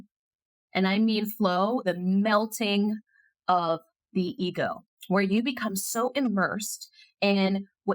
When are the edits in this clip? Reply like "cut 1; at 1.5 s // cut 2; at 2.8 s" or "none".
cut 1; at 1.8 s // cut 2; at 4.9 s